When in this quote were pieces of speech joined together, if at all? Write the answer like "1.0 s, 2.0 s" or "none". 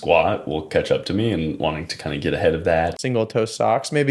2.9 s